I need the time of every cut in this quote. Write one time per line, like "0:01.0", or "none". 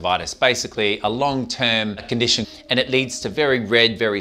0:02.5